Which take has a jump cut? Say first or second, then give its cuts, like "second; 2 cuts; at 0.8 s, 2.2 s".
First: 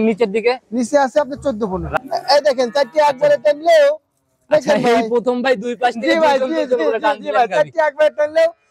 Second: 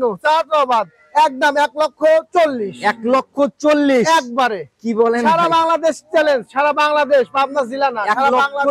first; 1 cut; at 2.0 s